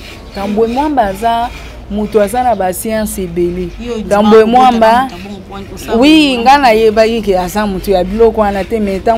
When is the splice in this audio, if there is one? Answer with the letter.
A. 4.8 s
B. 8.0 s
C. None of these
C